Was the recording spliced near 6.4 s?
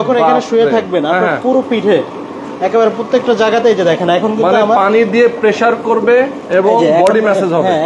yes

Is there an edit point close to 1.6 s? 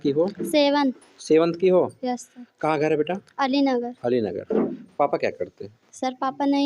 no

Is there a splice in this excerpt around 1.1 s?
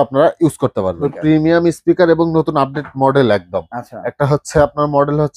yes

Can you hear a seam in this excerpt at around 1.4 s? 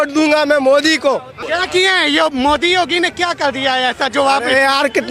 yes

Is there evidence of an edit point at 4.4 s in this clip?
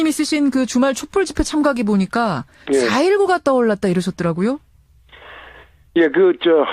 yes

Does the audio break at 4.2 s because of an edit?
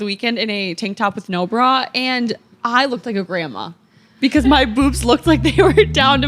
no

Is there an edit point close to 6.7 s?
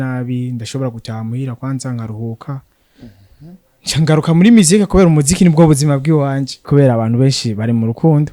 yes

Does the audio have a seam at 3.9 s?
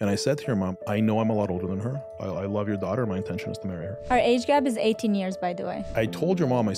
yes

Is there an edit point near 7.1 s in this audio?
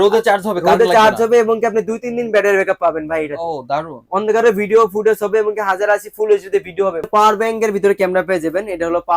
yes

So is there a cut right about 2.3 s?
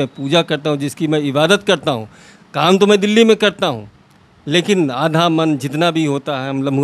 no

